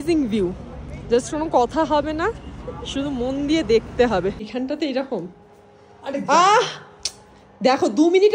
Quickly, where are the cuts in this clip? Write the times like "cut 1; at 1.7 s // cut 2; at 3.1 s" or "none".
cut 1; at 4.5 s

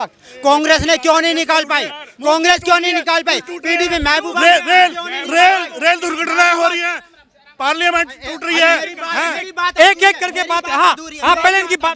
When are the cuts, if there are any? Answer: none

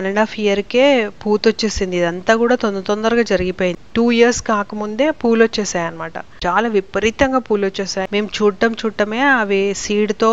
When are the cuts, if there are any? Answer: cut 1; at 3.8 s // cut 2; at 8.1 s

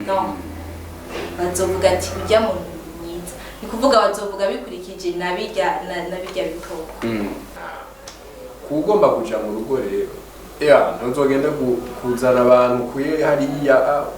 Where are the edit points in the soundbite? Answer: cut 1; at 7.5 s

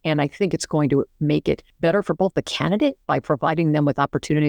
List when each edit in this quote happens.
cut 1; at 1.7 s

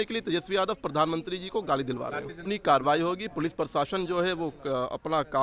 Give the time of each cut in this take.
cut 1; at 2.5 s

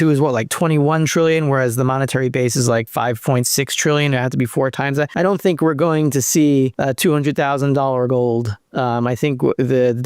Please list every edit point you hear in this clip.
cut 1; at 2.9 s // cut 2; at 5.1 s // cut 3; at 6.8 s

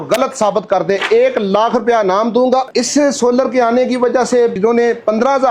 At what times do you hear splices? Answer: cut 1; at 2.7 s // cut 2; at 4.6 s

